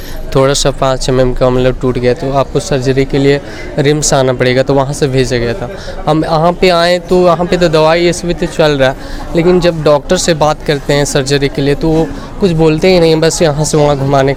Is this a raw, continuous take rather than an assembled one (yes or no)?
yes